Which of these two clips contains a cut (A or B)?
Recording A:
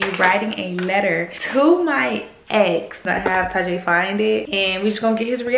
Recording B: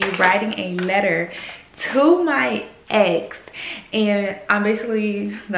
A